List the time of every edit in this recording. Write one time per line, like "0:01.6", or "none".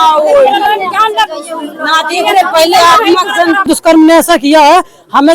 0:03.6